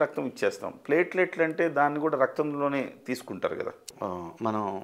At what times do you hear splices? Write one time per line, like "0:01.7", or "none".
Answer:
0:03.9